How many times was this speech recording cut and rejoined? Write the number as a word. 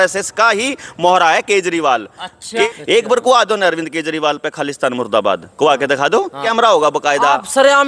two